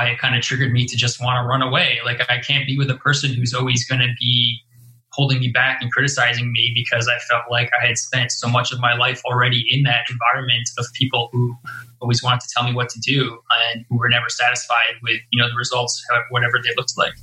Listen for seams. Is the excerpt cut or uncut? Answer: uncut